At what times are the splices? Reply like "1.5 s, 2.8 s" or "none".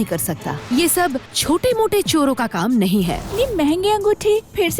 3.3 s